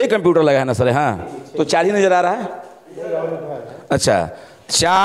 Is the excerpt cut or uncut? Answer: uncut